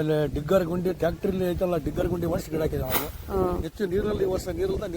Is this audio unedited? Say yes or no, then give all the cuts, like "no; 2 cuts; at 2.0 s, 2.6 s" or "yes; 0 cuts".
no; 1 cut; at 3.6 s